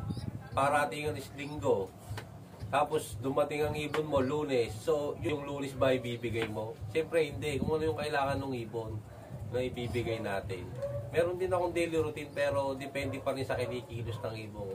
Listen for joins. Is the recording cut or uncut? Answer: uncut